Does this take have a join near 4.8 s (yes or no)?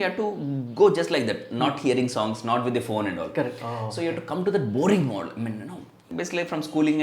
no